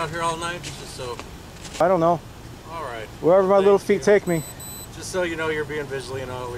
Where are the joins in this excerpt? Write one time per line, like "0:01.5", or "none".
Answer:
none